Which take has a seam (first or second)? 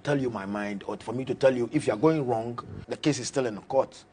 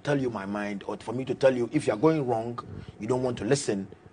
first